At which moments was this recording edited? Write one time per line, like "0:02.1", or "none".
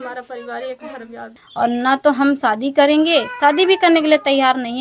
0:01.4